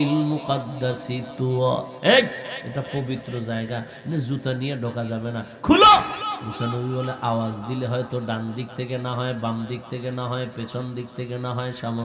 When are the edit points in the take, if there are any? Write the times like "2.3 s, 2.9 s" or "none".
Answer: 6.4 s